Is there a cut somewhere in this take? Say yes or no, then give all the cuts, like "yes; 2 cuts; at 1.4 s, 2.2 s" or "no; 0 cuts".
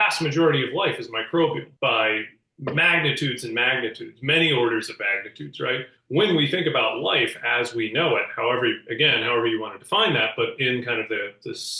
yes; 2 cuts; at 1.7 s, 5.9 s